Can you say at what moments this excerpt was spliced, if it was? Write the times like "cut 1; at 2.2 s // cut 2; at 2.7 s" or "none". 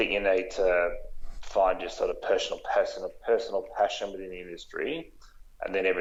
none